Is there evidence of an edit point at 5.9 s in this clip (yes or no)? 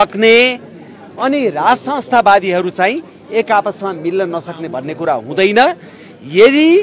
no